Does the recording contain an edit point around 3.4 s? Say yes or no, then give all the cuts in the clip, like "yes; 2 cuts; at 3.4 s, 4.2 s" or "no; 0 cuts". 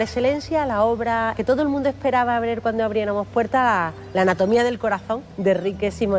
no; 2 cuts; at 1.4 s, 5.2 s